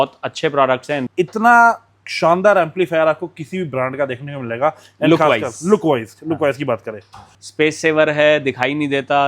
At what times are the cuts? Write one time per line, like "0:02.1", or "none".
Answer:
0:01.0
0:07.4